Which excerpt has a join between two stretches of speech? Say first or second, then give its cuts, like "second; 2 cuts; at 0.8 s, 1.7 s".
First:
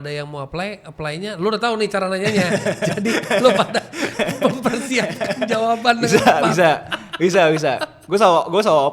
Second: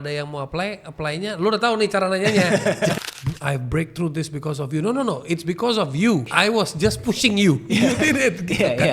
second; 2 cuts; at 3.0 s, 6.3 s